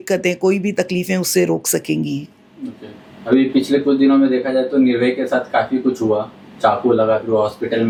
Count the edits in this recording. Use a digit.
0